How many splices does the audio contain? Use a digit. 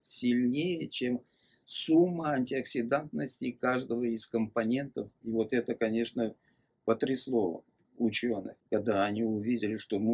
2